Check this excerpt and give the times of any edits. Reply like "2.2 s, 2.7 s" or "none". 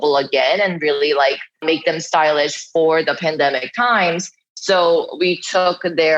1.6 s